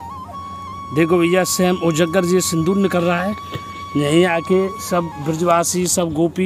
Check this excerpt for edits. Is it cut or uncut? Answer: uncut